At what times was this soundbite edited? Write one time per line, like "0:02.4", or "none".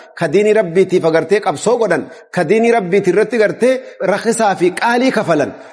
0:03.9